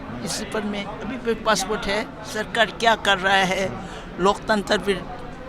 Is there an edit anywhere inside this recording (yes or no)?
yes